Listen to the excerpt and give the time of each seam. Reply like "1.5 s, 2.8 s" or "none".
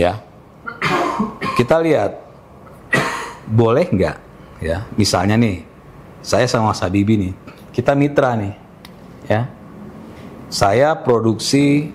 none